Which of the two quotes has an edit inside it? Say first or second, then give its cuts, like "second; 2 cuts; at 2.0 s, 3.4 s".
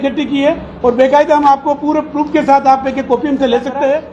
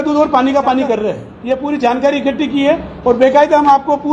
second; 1 cut; at 1.3 s